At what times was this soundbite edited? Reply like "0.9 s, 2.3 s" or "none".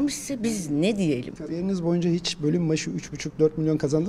1.4 s